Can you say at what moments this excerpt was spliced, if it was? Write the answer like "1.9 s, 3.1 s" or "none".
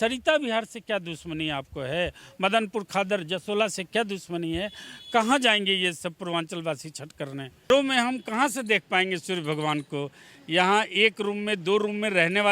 7.7 s